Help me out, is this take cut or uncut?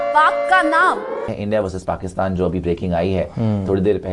cut